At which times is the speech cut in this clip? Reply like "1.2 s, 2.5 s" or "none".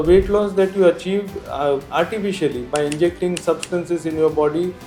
none